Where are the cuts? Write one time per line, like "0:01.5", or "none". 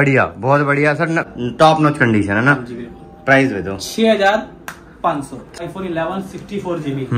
0:01.3
0:05.6